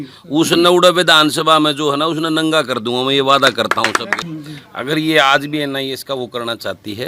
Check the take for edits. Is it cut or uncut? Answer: cut